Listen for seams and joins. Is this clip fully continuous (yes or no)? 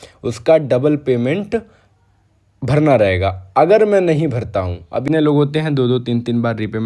no